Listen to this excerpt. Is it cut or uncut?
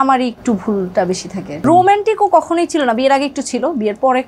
cut